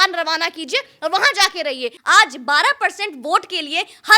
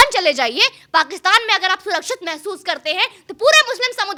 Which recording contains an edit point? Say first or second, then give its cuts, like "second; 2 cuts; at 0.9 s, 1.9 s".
first; 1 cut; at 2.0 s